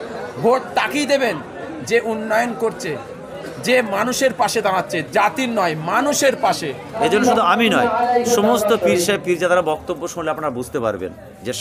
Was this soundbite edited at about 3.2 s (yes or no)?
no